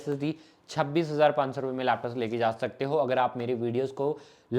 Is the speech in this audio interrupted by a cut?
no; 0 cuts

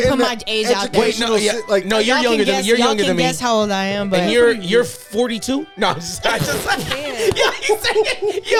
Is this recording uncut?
yes; 0 cuts

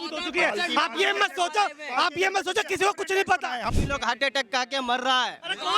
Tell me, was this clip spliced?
yes; 1 cut; at 3.7 s

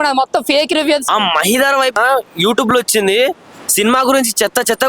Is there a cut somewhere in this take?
yes; 2 cuts; at 1.0 s, 2.0 s

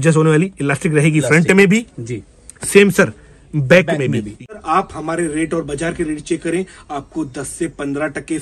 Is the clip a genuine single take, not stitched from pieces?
no; 1 cut; at 4.6 s

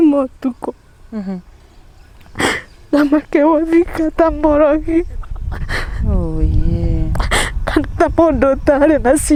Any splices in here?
no; 0 cuts

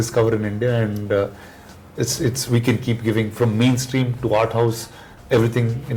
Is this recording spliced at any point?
no; 0 cuts

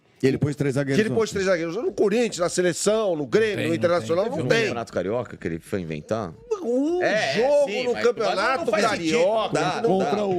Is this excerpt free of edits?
yes; 0 cuts

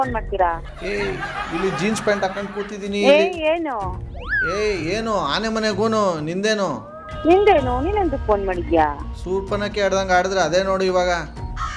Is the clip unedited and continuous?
yes; 0 cuts

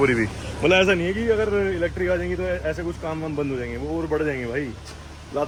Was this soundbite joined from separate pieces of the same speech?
no; 0 cuts

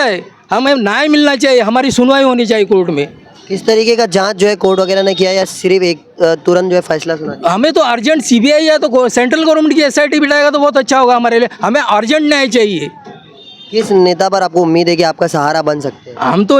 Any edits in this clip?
no; 0 cuts

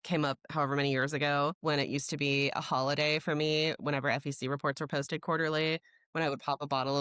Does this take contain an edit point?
yes; 1 cut; at 1.5 s

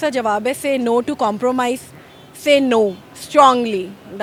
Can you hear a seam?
no; 0 cuts

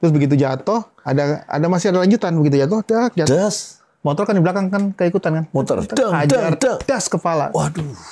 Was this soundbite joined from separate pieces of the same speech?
no; 0 cuts

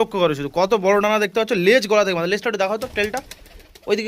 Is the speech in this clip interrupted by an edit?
no; 0 cuts

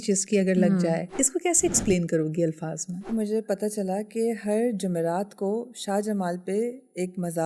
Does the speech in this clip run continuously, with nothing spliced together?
no; 2 cuts; at 1.1 s, 3.1 s

